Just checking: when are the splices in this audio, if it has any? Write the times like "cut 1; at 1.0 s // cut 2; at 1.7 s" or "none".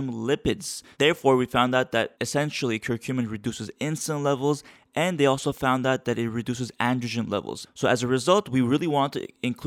cut 1; at 0.9 s // cut 2; at 7.6 s